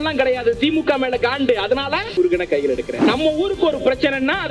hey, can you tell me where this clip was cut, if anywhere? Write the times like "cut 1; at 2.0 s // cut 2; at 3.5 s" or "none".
cut 1; at 2.1 s // cut 2; at 3.1 s